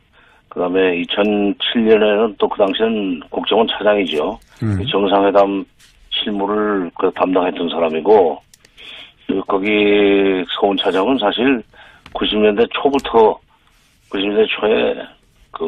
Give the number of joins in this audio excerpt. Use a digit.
0